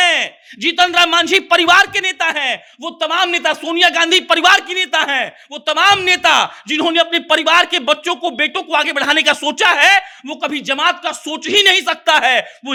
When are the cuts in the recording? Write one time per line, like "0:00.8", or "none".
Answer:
none